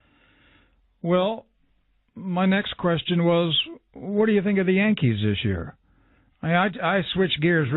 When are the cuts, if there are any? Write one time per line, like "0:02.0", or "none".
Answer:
0:03.2

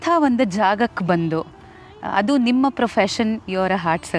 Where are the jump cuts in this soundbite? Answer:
none

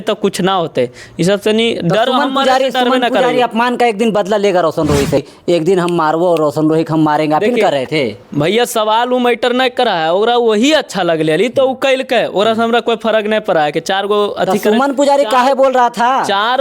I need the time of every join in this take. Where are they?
0:05.3

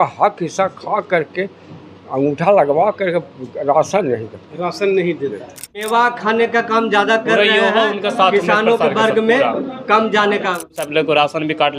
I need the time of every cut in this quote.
0:05.9
0:10.8

